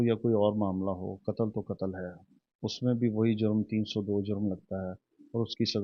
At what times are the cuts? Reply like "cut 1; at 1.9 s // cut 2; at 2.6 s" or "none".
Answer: none